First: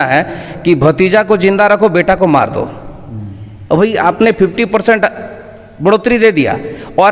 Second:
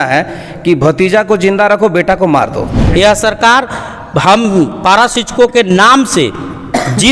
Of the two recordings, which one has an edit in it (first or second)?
second